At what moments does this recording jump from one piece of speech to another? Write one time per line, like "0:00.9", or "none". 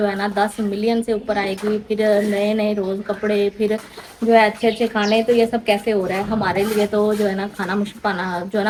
none